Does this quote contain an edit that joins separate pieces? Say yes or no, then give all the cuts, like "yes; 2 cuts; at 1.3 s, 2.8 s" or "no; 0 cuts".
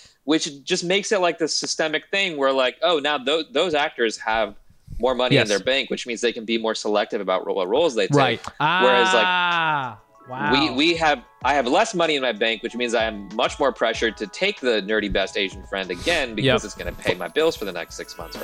no; 0 cuts